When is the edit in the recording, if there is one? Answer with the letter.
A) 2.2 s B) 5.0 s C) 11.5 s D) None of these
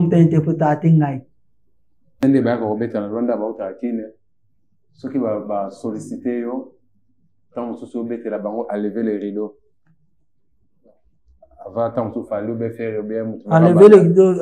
A